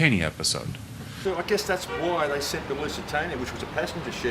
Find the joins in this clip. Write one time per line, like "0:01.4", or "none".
none